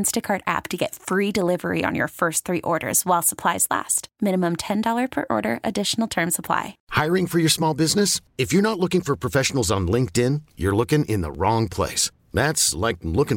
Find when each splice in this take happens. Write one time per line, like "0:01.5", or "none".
0:06.8